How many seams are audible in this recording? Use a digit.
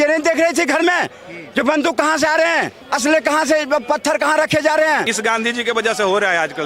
2